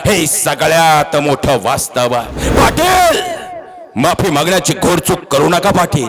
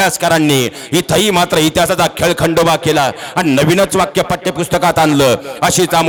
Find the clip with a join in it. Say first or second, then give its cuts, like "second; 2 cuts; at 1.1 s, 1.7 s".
first; 1 cut; at 2.4 s